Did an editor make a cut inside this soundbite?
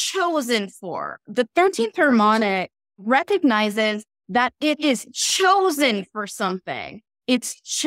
yes; 1 cut; at 3.0 s

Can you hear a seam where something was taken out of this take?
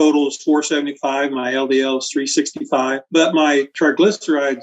yes; 1 cut; at 3.0 s

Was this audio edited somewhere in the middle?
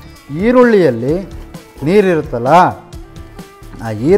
no; 0 cuts

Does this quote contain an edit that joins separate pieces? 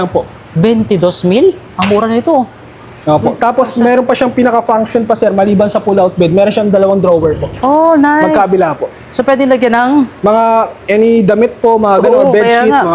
no; 0 cuts

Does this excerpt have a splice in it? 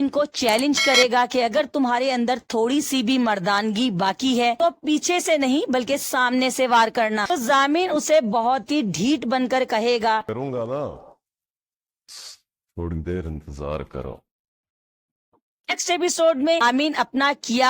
yes; 3 cuts; at 7.2 s, 15.8 s, 16.6 s

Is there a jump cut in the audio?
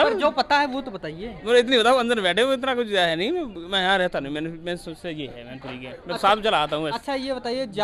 no; 0 cuts

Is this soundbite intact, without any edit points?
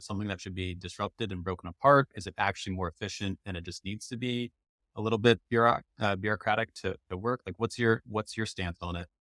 yes; 0 cuts

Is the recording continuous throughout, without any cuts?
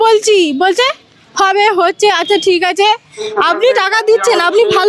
no; 1 cut; at 3.3 s

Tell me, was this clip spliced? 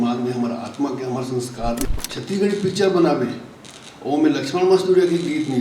yes; 1 cut; at 1.9 s

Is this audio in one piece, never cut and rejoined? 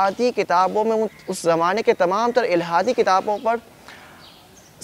yes; 0 cuts

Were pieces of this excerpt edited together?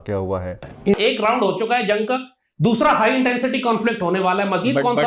yes; 1 cut; at 0.9 s

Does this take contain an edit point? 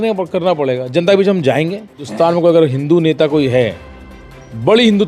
yes; 1 cut; at 2.1 s

